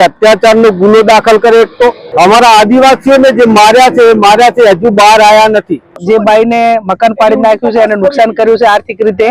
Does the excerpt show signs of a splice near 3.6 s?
no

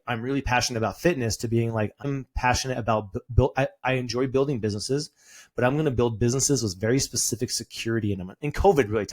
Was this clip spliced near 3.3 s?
yes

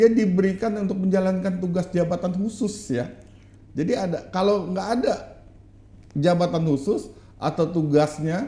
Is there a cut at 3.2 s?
no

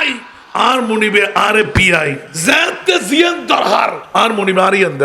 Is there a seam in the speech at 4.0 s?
yes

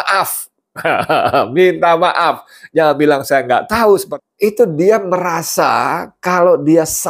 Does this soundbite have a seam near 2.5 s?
no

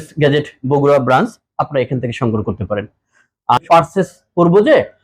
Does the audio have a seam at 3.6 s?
yes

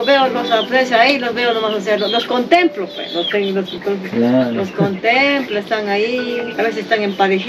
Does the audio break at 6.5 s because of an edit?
yes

